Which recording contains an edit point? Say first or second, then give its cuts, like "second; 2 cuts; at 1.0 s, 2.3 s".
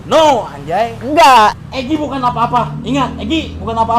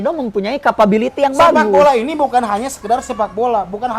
first; 1 cut; at 1.5 s